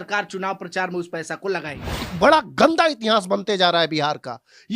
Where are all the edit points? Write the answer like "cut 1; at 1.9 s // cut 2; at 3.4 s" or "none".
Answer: cut 1; at 2.1 s